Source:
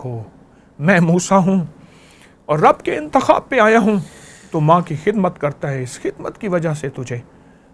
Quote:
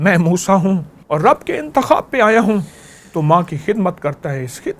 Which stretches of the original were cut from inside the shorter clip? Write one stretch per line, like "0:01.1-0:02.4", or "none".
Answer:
0:01.8-0:02.3

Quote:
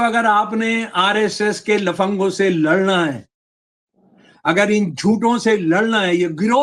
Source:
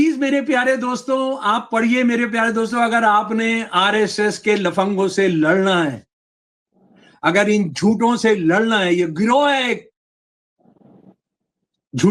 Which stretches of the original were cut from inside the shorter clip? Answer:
none

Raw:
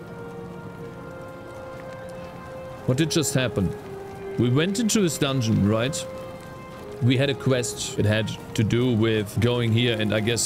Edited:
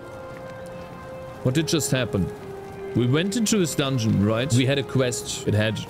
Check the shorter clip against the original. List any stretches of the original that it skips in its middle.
0:05.9-0:07.0

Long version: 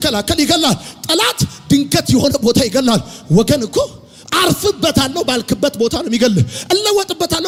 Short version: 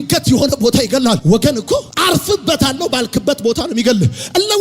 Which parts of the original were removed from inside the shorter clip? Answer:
0:03.3-0:03.8

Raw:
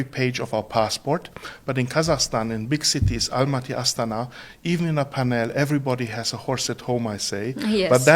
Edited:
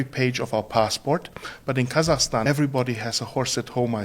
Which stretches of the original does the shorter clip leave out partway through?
0:02.4-0:05.6

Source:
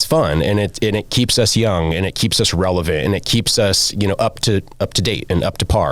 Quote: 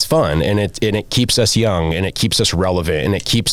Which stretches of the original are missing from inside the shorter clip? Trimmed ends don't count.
none

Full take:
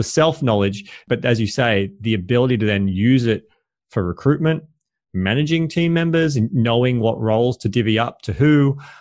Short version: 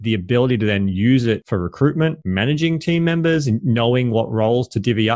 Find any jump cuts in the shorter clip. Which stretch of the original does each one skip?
0:03.4-0:03.9
0:04.6-0:05.1

